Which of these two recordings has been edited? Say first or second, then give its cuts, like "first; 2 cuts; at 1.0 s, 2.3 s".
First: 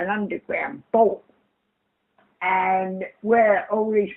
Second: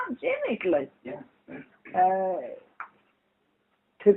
second; 1 cut; at 2.1 s